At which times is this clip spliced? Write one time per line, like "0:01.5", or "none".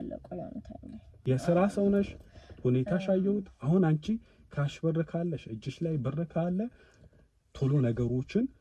0:01.1